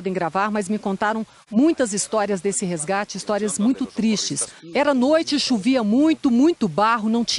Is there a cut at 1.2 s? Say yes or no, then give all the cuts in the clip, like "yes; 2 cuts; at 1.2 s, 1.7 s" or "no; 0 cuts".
no; 1 cut; at 4.9 s